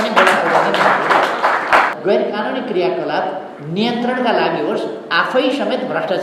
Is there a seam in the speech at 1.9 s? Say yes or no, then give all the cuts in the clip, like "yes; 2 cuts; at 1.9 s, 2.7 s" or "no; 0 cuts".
yes; 1 cut; at 1.9 s